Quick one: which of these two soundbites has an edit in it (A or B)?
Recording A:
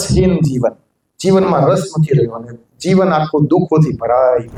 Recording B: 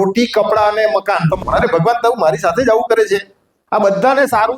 B